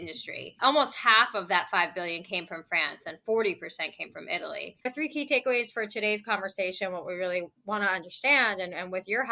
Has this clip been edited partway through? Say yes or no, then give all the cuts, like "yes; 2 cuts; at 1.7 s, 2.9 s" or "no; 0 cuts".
yes; 1 cut; at 4.9 s